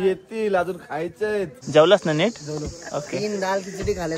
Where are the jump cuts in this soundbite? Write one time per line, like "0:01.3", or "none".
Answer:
0:01.6